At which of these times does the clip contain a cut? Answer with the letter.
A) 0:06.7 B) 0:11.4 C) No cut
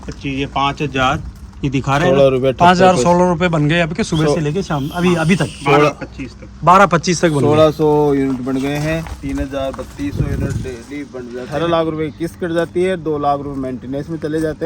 B